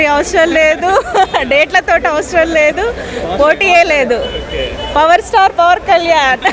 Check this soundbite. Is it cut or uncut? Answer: uncut